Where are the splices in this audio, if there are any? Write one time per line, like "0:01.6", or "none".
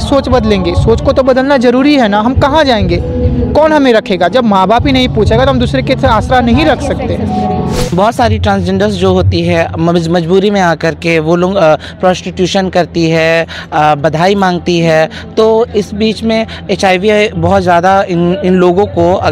0:07.8